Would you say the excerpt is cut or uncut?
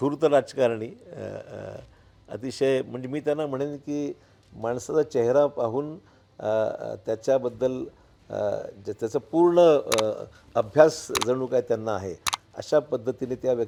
uncut